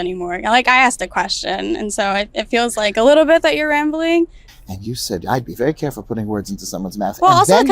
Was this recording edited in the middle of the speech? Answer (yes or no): yes